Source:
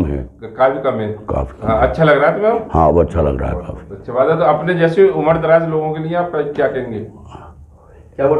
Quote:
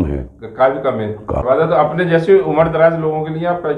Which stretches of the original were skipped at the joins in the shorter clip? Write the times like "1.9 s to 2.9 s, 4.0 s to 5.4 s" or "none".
1.3 s to 4.0 s